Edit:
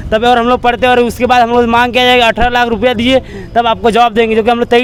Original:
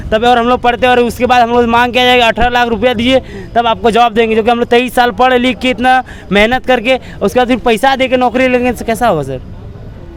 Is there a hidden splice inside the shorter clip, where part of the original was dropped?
no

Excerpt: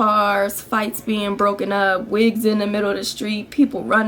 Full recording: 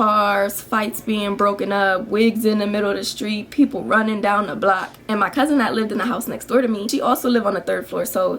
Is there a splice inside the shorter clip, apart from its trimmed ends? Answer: no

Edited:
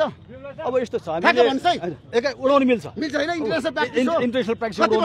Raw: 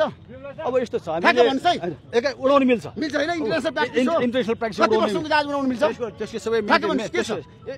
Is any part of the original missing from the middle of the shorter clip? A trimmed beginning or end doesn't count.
no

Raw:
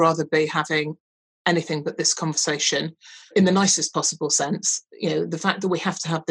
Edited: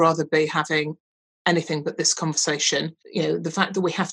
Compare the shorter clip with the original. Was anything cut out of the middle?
yes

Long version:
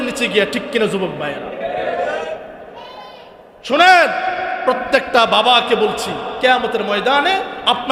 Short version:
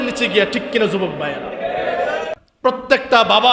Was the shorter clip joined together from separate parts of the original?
yes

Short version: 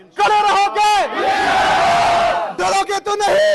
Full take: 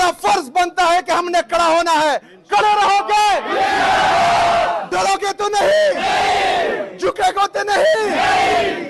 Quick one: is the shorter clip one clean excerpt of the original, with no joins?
yes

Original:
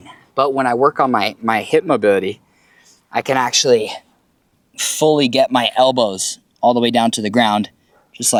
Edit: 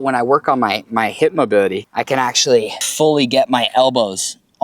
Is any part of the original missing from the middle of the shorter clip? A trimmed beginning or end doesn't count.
yes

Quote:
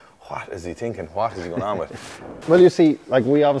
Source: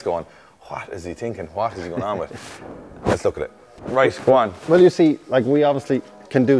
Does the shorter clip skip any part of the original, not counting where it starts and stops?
yes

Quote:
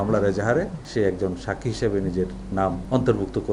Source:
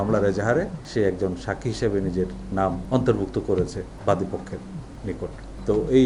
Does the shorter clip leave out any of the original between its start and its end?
no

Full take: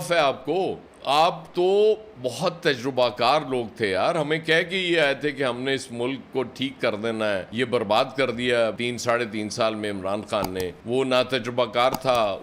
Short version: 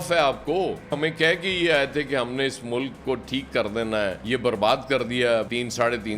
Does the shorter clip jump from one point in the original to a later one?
yes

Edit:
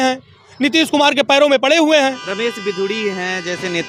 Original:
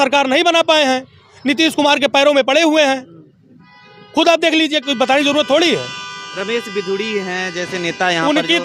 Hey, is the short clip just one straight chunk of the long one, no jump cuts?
no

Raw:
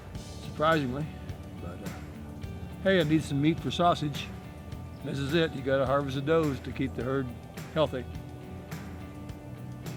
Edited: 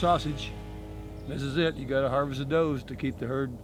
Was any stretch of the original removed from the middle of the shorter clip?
no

